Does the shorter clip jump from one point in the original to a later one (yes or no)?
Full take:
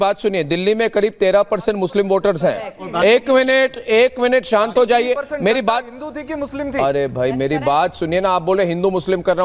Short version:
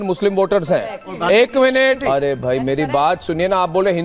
yes